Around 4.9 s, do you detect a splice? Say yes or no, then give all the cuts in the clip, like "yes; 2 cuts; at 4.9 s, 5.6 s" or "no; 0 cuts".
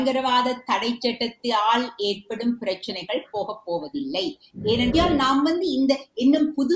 yes; 1 cut; at 4.9 s